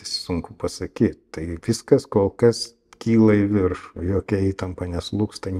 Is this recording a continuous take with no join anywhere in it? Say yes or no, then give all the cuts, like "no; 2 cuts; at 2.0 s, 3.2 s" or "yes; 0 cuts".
yes; 0 cuts